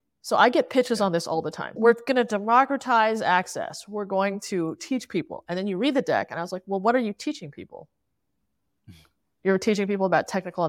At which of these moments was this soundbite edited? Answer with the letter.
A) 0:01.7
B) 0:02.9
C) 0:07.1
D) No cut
A